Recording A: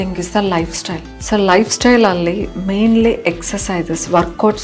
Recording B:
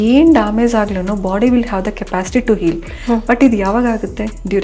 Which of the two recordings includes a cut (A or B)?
A